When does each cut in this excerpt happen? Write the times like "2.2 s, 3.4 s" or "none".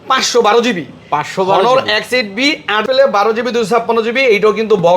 2.8 s